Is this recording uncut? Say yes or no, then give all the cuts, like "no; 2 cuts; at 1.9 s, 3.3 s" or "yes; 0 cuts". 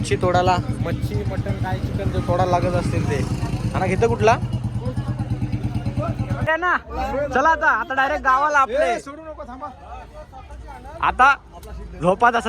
no; 1 cut; at 6.5 s